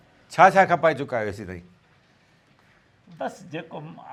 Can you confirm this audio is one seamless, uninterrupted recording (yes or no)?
yes